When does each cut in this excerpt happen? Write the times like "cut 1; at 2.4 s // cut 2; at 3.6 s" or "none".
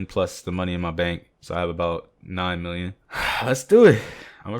cut 1; at 3.0 s